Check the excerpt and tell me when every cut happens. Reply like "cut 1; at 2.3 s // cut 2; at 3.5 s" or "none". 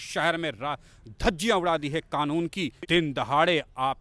cut 1; at 2.8 s